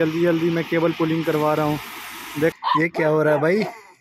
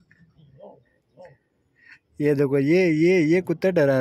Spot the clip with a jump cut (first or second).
first